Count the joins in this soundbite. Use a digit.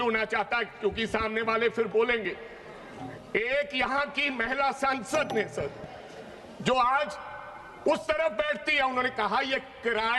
0